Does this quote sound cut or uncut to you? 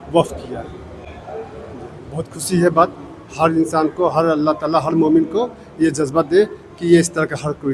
uncut